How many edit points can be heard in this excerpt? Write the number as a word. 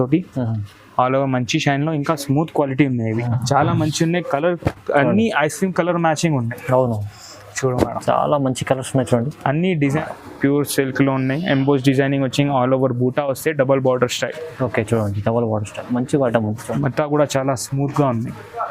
two